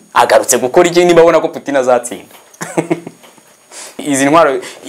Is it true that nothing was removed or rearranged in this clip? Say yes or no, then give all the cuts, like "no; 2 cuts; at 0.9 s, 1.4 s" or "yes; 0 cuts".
no; 1 cut; at 3.9 s